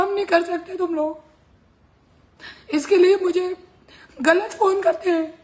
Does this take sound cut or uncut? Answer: uncut